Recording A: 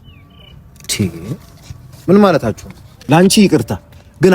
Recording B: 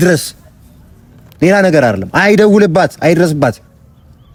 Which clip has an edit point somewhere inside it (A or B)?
A